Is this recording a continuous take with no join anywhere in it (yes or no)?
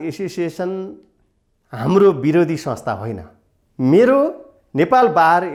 yes